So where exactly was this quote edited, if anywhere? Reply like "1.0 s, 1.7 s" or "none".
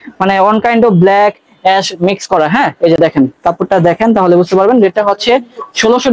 none